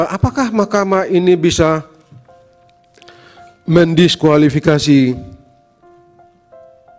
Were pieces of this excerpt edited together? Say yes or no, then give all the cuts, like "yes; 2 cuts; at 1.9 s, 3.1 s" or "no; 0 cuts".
yes; 1 cut; at 5.5 s